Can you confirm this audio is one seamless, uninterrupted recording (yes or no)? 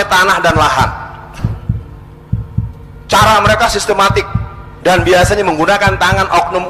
no